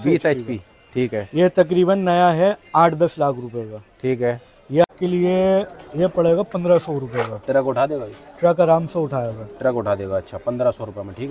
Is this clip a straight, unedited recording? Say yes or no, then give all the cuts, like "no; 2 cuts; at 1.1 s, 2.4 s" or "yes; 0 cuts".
no; 1 cut; at 4.9 s